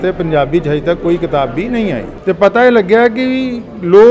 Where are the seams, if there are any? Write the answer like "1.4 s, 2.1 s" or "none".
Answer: 2.1 s